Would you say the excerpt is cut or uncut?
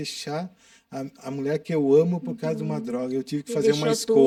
uncut